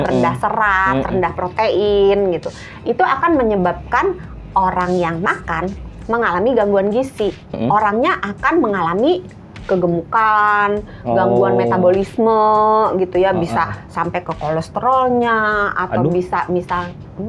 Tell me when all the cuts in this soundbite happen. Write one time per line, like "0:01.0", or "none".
0:07.6